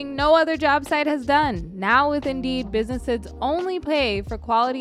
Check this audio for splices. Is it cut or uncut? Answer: uncut